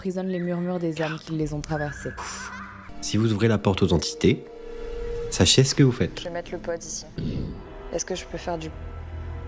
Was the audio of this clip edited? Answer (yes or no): yes